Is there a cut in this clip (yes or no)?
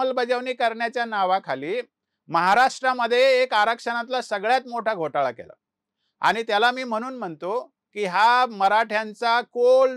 no